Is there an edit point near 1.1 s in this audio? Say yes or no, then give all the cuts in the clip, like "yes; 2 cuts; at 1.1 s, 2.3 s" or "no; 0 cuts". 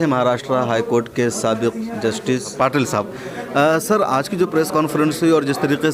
no; 1 cut; at 2.5 s